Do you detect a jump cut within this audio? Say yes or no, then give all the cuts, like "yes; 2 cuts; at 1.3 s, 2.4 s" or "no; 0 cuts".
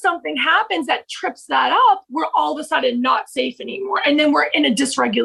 no; 0 cuts